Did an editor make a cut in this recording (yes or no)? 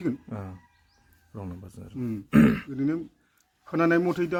no